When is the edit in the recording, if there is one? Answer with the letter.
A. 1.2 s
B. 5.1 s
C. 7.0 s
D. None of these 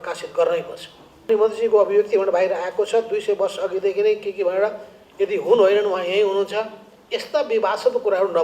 A